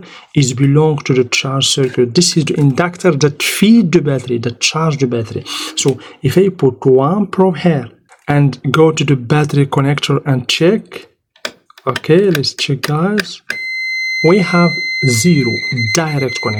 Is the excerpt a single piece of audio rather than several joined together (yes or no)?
yes